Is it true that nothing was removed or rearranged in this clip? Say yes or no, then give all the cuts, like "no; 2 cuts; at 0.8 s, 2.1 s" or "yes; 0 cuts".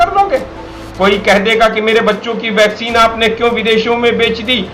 yes; 0 cuts